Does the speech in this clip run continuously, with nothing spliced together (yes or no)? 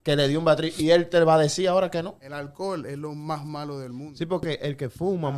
no